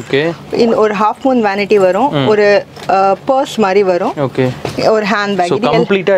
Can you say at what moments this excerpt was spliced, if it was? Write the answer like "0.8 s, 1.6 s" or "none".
none